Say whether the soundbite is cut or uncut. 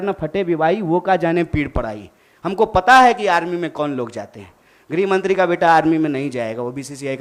uncut